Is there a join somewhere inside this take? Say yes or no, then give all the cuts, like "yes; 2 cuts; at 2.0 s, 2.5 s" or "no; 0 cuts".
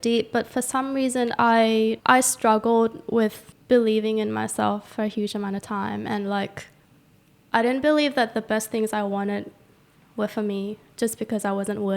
yes; 2 cuts; at 2.0 s, 3.5 s